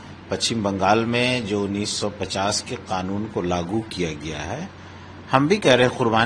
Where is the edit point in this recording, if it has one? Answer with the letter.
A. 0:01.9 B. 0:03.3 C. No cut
C